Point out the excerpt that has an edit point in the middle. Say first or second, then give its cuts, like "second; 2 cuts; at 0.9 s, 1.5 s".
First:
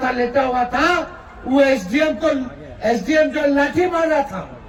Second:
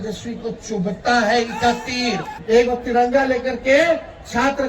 second; 1 cut; at 2.3 s